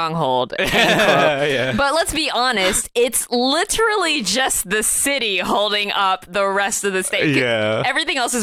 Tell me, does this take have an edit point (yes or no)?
no